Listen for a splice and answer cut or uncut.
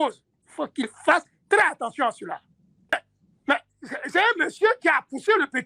cut